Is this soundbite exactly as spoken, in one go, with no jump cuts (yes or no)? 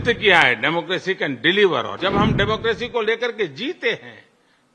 no